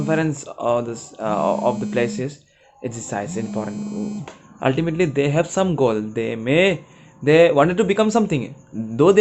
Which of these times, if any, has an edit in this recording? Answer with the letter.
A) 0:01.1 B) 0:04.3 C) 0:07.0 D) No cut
B